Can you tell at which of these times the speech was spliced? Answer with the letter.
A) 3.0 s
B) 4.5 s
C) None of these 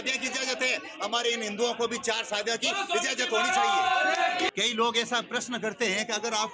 B